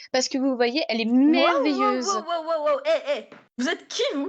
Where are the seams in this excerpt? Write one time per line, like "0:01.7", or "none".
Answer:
0:03.4